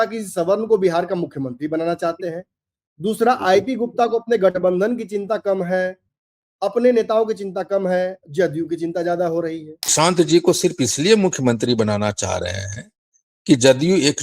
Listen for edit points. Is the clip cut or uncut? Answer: cut